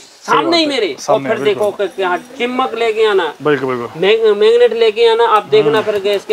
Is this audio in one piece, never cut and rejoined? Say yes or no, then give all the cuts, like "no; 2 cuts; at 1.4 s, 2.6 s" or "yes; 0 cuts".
yes; 0 cuts